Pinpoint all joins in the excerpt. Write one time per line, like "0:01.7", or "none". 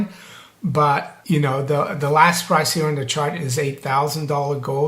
0:01.1